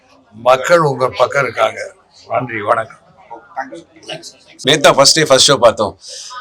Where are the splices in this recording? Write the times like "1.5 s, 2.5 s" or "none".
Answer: 4.4 s